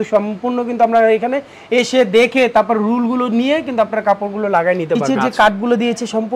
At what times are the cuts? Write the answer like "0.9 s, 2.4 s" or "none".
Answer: 5.0 s